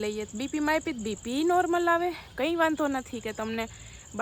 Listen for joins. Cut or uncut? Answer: uncut